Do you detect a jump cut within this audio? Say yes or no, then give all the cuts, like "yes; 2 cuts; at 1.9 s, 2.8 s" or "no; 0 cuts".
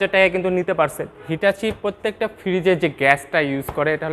yes; 1 cut; at 1.3 s